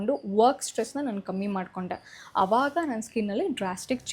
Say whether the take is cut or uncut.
uncut